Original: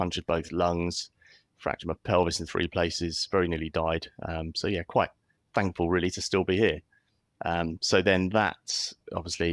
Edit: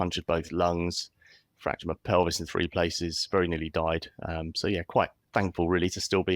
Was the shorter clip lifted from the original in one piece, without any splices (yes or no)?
no